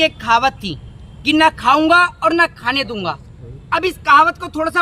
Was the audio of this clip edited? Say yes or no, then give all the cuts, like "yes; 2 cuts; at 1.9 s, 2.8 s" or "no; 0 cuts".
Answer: no; 0 cuts